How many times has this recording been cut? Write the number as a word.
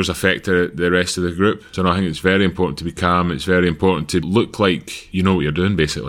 three